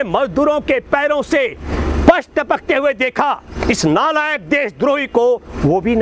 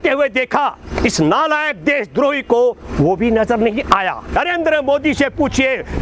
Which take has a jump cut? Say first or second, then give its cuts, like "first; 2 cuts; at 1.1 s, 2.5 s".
second; 1 cut; at 4.3 s